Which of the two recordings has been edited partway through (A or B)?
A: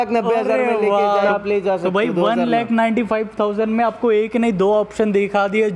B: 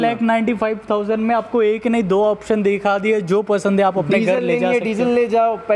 A